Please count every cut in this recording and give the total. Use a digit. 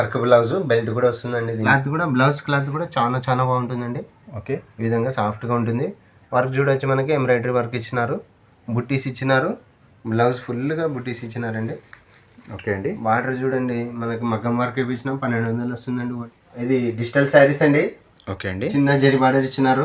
2